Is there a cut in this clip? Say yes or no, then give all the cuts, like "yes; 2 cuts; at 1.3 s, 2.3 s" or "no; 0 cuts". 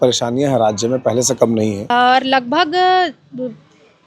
yes; 1 cut; at 1.9 s